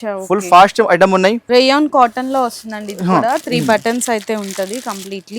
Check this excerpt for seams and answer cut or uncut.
cut